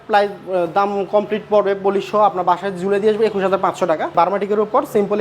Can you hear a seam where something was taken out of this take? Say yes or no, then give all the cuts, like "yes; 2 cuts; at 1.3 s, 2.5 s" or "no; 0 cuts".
yes; 1 cut; at 4.1 s